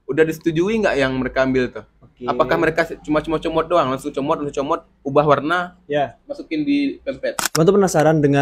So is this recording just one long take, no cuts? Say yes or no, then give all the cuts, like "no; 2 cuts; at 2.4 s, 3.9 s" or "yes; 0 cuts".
no; 1 cut; at 7.4 s